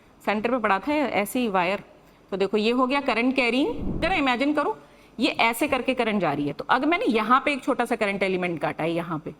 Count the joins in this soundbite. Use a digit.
1